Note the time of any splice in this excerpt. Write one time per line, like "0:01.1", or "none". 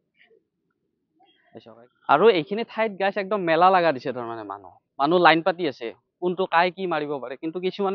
0:01.7

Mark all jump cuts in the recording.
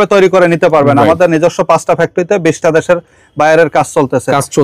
none

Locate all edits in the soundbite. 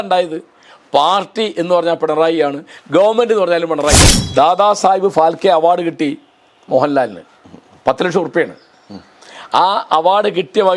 0:04.1

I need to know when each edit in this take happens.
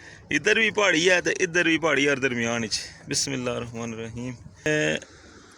0:04.7

